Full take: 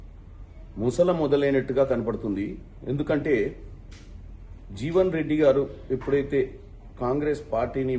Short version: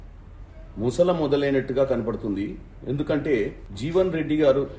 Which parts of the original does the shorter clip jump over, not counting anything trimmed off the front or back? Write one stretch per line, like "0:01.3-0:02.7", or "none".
0:03.7-0:04.7